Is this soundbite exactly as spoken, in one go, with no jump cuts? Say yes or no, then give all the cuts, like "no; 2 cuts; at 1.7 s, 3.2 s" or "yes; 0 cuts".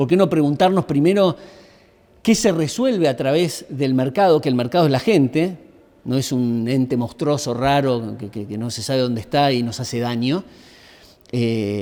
yes; 0 cuts